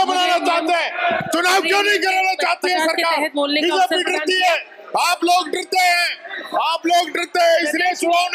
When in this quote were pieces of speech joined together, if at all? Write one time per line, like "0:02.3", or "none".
none